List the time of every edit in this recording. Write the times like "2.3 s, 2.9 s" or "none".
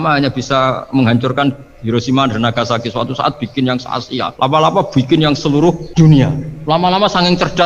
4.3 s, 5.8 s, 6.5 s